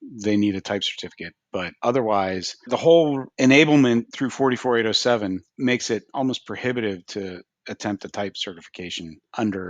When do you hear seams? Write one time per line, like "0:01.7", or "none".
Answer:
0:01.7
0:02.7
0:03.3
0:04.2
0:05.5